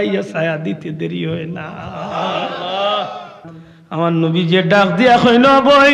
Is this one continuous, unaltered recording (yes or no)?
no